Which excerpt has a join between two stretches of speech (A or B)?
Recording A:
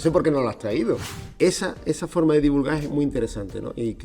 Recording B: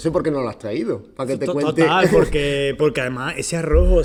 A